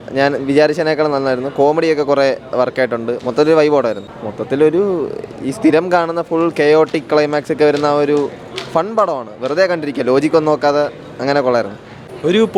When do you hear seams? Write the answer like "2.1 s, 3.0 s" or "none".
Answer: none